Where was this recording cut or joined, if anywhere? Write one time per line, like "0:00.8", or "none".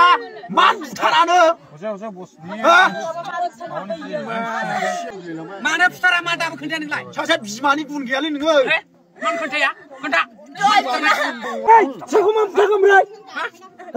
0:05.1
0:11.7

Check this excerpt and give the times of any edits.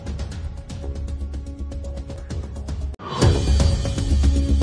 0:01.3

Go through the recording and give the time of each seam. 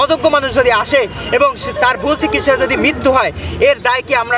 none

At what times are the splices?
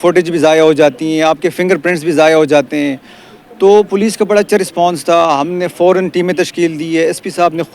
none

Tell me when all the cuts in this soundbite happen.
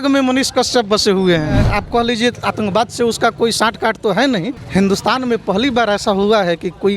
0:01.7
0:04.6

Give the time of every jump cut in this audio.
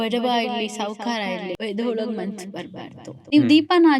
0:01.6
0:03.3

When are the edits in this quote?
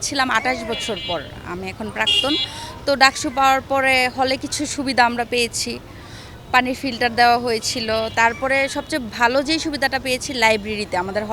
none

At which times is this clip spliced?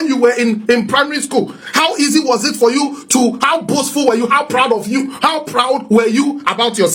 none

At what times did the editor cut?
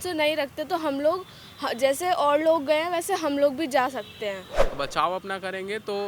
0:04.7

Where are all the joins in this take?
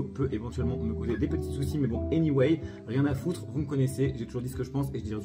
none

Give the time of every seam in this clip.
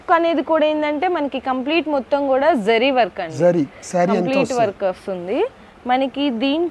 none

